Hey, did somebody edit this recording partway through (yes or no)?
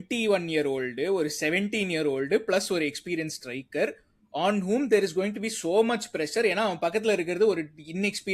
no